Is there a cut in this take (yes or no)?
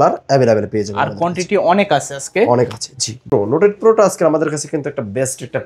yes